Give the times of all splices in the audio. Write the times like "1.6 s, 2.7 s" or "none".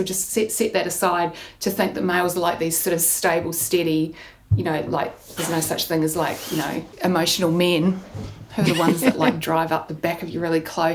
6.9 s